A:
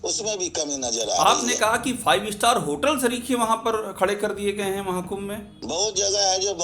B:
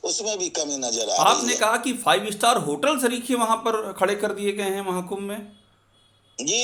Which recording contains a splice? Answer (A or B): A